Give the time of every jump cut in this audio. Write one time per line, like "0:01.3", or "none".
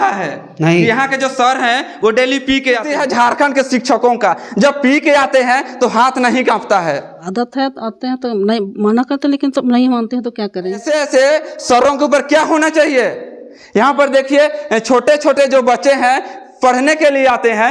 0:02.9
0:07.2
0:10.8